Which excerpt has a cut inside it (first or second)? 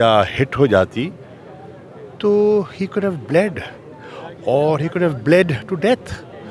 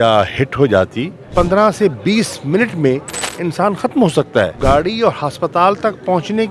second